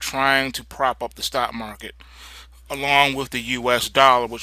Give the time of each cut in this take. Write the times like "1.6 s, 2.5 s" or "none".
2.7 s